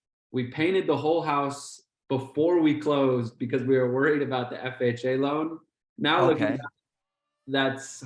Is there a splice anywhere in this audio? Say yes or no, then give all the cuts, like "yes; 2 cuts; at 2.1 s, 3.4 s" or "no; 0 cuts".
no; 0 cuts